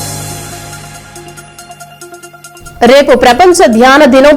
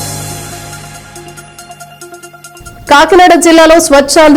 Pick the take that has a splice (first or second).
first